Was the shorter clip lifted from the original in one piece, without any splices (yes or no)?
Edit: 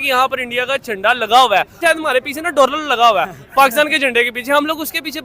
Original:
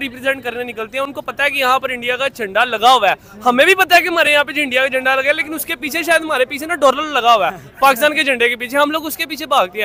no